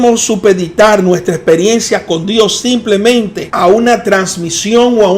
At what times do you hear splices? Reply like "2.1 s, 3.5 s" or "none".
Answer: 3.4 s

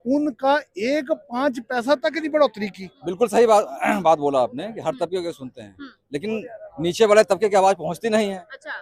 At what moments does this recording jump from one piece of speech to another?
2.9 s

